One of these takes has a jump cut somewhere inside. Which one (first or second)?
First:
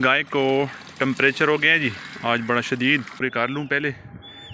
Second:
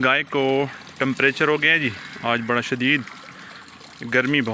first